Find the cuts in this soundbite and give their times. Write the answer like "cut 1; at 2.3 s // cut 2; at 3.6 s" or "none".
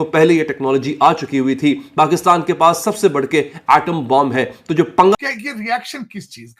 cut 1; at 5.1 s